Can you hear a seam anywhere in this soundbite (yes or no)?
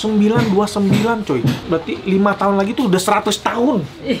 no